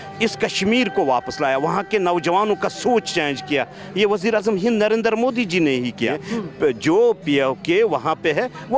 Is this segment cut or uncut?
cut